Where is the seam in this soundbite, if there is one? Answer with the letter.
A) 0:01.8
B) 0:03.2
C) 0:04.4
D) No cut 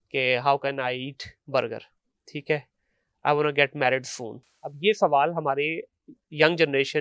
D